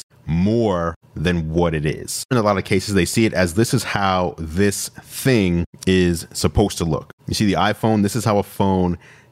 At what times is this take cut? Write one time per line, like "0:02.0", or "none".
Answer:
0:02.3